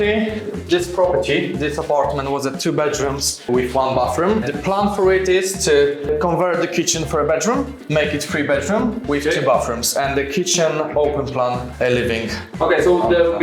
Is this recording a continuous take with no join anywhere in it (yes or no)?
yes